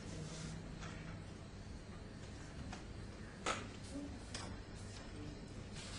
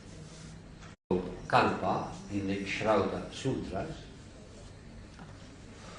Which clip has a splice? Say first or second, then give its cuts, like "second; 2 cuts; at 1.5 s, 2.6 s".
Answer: first; 1 cut; at 0.9 s